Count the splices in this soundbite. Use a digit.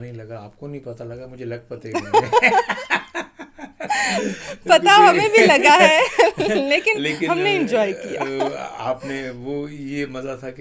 0